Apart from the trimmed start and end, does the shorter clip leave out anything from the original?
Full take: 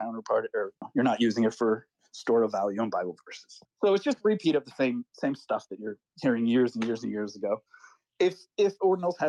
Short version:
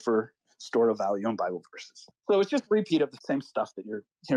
yes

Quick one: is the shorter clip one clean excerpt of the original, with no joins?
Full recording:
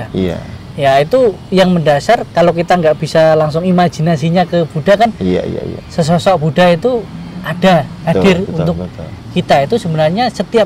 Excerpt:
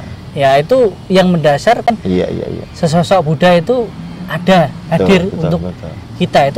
no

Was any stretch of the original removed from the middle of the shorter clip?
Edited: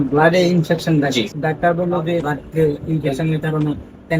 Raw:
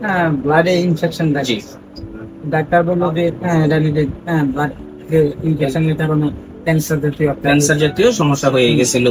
yes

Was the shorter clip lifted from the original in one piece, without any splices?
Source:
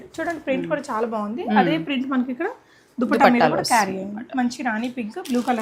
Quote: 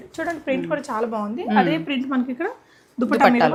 yes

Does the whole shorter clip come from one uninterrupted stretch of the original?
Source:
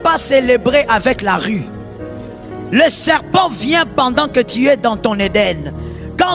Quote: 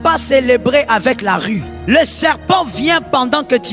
no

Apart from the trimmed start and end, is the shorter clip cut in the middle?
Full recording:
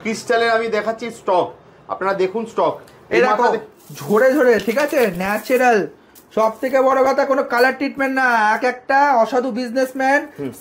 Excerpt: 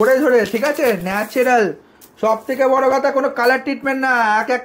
no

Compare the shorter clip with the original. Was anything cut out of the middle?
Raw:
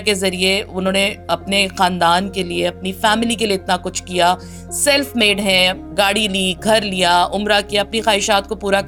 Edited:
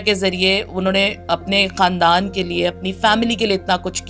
no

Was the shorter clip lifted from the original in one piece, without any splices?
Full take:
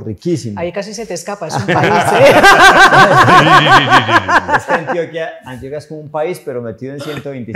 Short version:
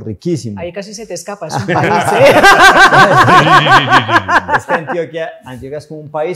yes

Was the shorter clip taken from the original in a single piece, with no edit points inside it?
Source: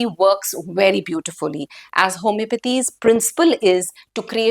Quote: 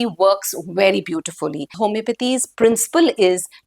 no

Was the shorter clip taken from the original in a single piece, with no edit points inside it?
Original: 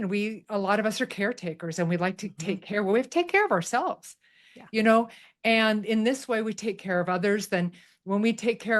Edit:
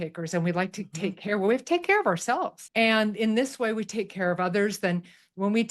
no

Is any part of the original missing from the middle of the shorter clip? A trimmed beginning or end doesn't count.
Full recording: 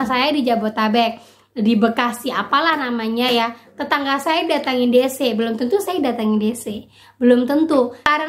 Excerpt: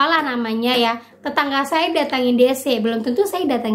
no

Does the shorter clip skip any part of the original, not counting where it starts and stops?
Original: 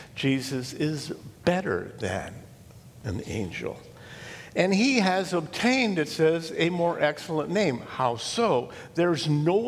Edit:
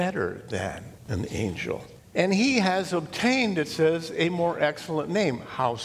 yes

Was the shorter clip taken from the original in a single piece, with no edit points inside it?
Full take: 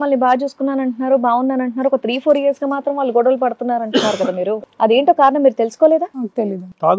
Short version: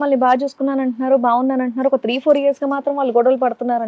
yes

